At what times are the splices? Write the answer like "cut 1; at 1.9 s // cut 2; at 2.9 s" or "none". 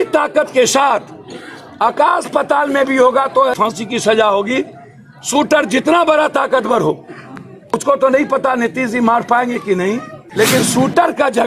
cut 1; at 3.5 s // cut 2; at 7.7 s // cut 3; at 10.2 s